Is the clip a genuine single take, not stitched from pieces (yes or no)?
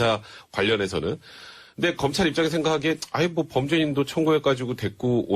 yes